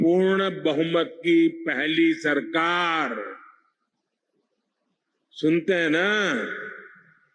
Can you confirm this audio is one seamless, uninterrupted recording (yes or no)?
yes